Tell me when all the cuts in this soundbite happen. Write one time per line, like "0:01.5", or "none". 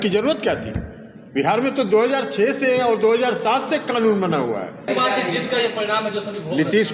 0:04.9